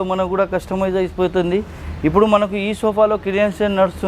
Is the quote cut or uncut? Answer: uncut